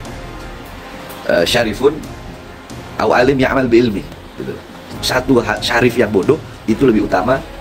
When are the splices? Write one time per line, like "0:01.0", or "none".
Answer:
0:05.0